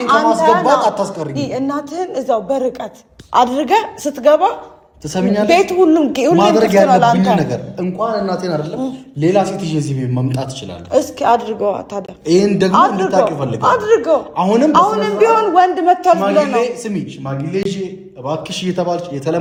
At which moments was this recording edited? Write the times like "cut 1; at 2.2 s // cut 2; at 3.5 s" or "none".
none